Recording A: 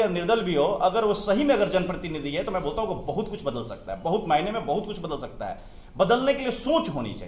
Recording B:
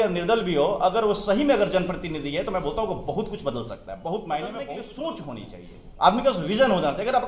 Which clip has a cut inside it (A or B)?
B